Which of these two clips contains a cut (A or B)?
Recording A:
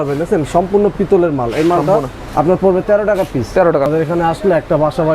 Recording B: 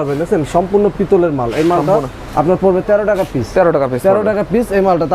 A